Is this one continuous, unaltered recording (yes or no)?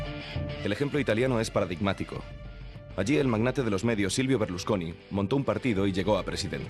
no